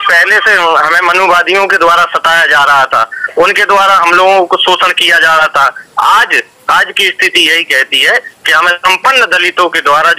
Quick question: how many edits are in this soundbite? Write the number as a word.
zero